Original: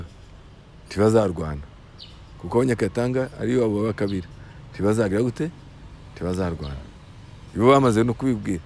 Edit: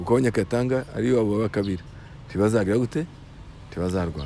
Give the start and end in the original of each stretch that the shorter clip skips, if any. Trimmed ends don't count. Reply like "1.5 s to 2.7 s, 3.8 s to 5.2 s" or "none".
none